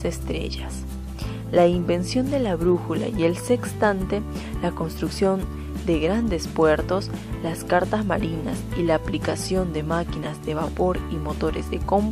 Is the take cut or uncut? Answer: cut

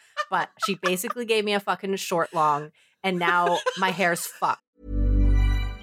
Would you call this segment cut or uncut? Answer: cut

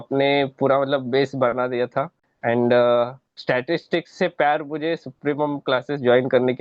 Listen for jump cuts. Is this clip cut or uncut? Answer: uncut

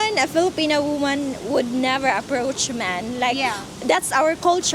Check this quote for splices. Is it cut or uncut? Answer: uncut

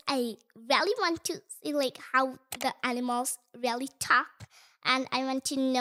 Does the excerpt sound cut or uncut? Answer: uncut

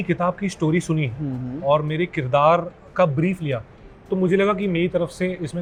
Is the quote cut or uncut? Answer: uncut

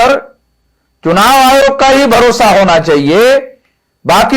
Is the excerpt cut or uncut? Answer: uncut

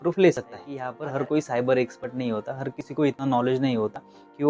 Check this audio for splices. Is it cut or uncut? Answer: cut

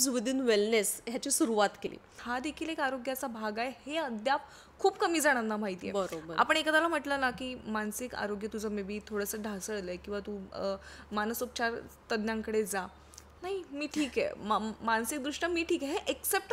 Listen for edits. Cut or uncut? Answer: cut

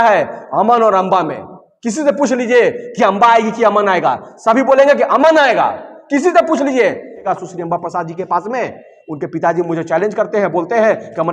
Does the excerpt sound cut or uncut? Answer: cut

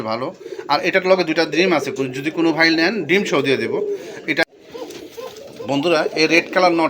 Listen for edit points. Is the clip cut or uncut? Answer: cut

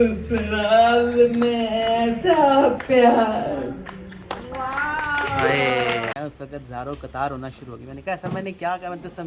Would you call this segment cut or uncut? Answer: cut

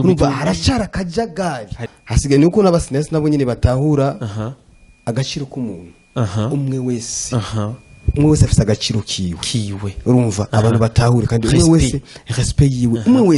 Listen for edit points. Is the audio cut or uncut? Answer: cut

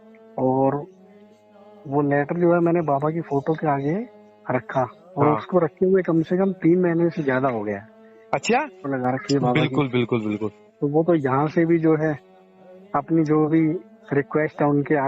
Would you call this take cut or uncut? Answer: cut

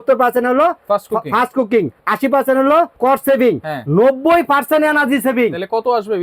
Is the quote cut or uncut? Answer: cut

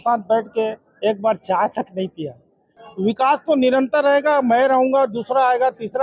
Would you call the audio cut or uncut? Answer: cut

